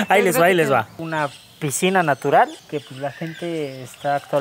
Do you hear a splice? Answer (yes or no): yes